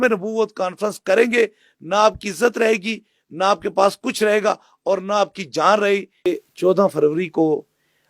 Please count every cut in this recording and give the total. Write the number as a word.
one